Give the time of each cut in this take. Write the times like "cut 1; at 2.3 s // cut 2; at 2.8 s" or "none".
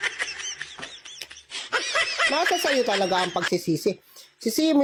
none